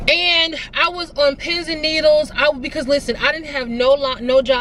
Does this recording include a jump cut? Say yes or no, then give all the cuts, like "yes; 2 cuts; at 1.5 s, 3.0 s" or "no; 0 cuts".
no; 0 cuts